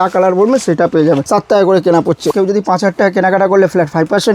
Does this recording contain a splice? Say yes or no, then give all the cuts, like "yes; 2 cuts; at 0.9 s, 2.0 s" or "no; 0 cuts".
yes; 2 cuts; at 1.2 s, 2.3 s